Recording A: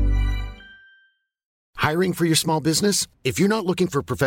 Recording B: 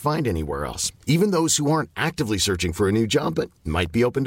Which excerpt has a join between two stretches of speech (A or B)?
A